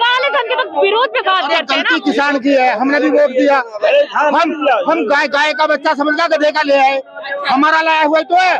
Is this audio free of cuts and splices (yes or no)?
yes